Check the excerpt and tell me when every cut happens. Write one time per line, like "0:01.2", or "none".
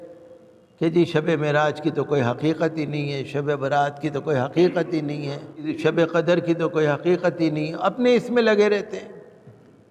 0:05.7

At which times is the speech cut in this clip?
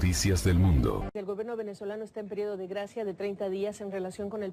0:01.1

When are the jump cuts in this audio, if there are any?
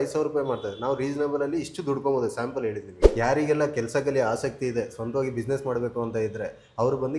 0:03.0

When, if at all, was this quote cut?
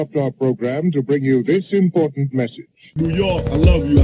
none

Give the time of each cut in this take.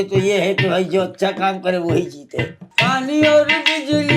0:02.6

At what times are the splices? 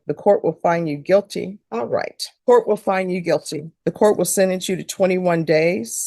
none

